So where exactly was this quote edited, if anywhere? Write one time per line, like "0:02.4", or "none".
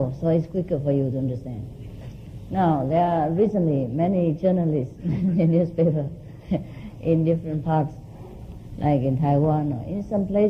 none